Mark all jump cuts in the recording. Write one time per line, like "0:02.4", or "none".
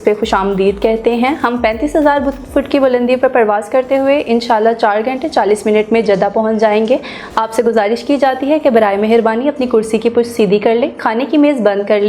none

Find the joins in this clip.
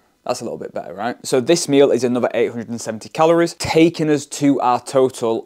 0:01.2
0:03.6

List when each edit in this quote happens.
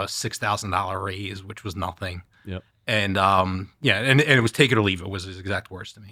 none

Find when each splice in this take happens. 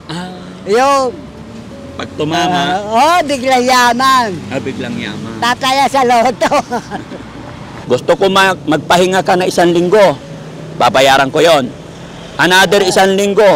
0:07.7

